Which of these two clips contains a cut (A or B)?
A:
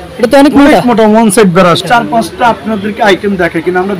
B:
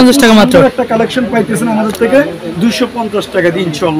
A